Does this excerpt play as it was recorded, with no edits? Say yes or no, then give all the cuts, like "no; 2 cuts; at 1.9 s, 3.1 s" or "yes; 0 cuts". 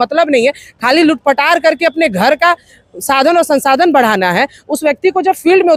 yes; 0 cuts